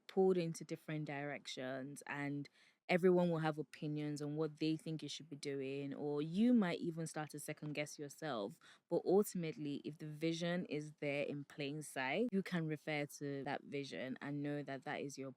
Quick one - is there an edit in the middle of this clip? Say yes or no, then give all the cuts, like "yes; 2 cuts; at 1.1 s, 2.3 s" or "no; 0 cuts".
yes; 2 cuts; at 12.3 s, 13.4 s